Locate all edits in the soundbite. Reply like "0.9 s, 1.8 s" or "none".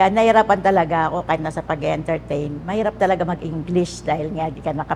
none